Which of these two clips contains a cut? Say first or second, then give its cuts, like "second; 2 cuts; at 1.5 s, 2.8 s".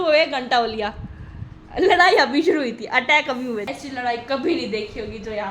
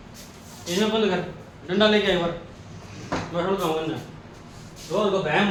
first; 1 cut; at 3.7 s